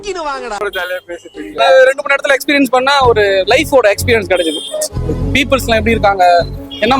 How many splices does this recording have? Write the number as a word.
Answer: one